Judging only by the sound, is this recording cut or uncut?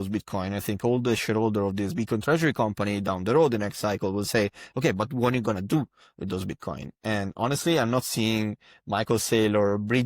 uncut